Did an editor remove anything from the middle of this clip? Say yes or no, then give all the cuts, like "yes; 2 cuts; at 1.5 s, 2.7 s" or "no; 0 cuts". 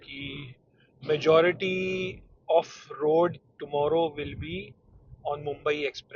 no; 0 cuts